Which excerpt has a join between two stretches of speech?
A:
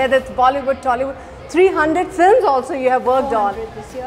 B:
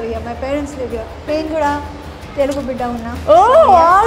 B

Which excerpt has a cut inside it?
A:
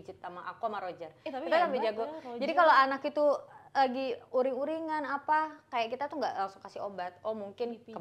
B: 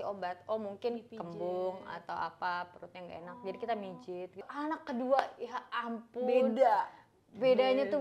B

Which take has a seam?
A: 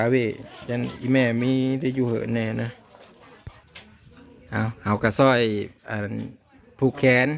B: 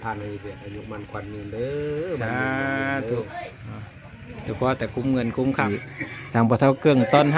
B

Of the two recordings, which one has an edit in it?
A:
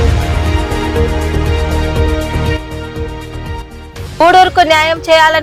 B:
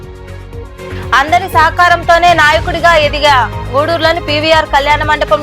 B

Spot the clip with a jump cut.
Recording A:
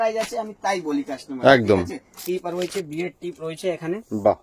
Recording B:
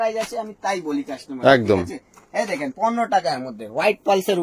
A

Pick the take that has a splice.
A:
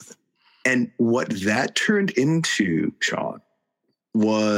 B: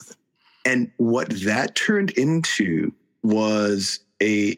B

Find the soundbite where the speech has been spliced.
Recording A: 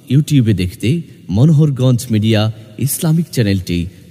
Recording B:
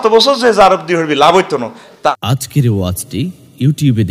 B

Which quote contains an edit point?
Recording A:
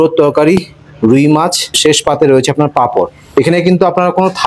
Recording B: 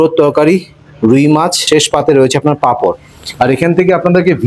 B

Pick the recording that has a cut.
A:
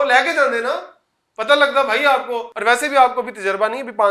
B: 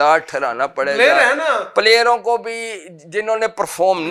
A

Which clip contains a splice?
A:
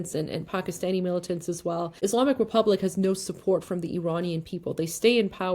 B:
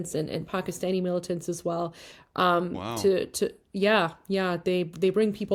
A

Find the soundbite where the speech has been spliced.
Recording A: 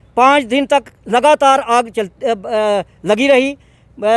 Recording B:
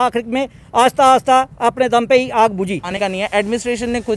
B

